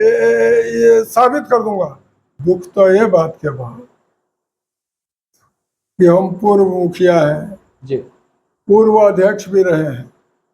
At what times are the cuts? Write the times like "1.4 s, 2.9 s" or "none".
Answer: 2.3 s

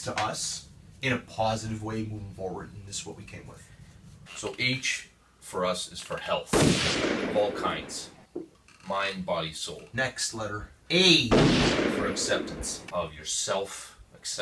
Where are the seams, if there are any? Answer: 9.8 s, 12.8 s

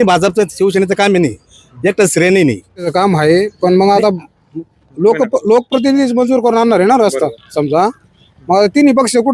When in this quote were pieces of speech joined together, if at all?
2.9 s

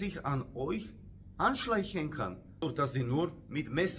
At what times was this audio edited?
2.6 s

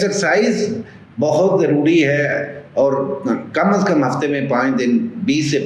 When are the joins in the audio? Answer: none

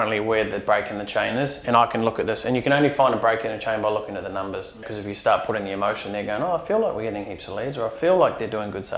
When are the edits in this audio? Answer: 4.9 s

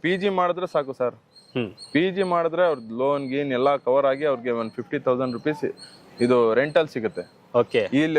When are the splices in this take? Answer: none

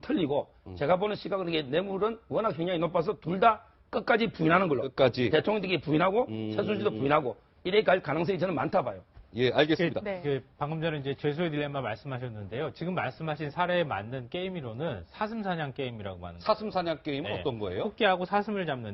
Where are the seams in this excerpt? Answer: 1.9 s

